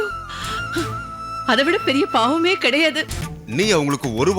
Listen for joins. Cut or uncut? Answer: cut